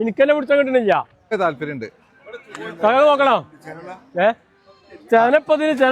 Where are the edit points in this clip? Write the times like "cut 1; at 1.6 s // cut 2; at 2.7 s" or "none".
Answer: cut 1; at 1.3 s